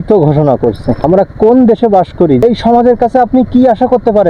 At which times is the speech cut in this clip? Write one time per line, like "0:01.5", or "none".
0:01.0
0:02.4

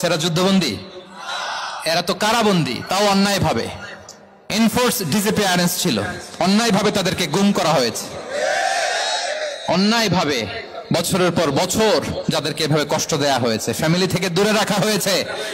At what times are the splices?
none

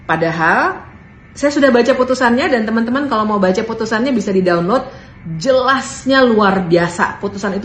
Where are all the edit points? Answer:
none

